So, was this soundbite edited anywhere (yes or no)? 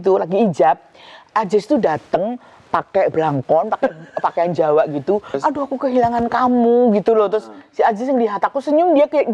yes